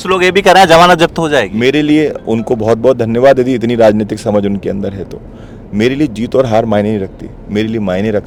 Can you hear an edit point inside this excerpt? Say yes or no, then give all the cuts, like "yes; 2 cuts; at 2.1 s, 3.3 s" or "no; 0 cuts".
no; 0 cuts